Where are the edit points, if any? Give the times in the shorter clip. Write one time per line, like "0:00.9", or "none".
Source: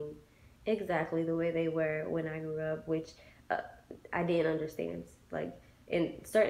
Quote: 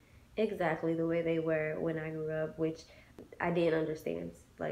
0:03.0